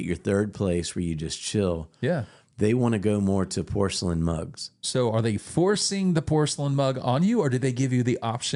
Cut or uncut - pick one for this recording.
uncut